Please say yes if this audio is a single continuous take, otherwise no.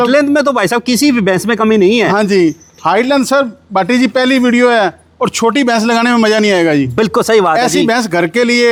yes